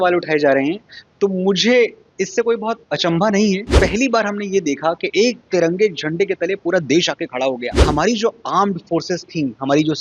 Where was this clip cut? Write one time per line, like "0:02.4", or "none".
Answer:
0:03.7
0:07.8